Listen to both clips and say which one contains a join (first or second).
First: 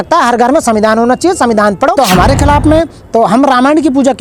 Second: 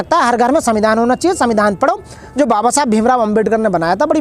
first